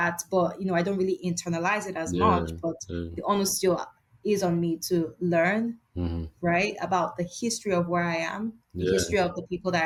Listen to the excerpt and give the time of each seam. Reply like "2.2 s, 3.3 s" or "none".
none